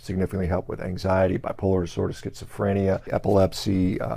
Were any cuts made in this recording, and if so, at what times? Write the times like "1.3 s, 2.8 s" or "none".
3.1 s